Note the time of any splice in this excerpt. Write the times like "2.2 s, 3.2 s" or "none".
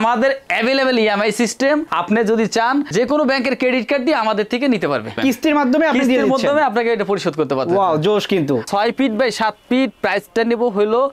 5.2 s, 8.7 s